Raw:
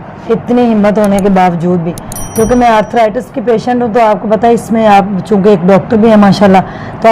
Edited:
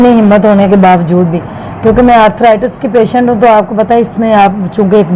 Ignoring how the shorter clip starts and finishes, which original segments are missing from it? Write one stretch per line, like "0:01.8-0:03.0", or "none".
none